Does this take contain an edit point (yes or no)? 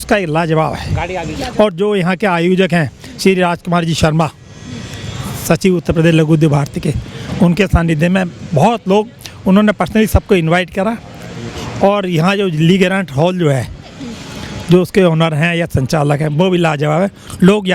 no